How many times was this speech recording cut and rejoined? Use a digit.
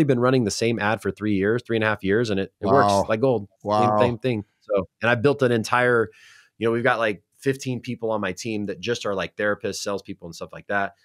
1